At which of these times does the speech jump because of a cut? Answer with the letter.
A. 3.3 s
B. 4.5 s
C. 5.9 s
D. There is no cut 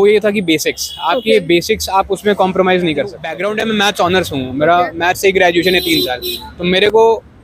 A